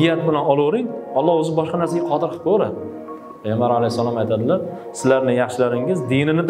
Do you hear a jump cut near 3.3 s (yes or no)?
yes